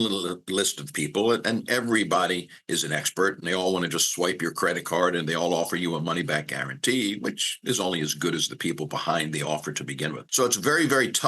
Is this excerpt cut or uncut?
cut